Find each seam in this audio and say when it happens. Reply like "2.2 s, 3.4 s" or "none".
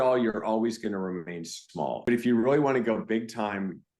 2.0 s